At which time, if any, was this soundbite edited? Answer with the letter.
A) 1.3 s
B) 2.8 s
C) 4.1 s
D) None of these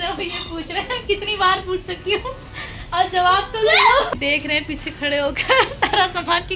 C